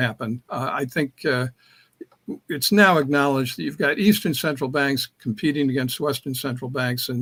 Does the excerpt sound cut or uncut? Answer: uncut